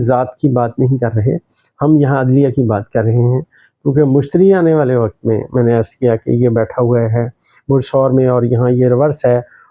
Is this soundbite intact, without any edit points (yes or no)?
yes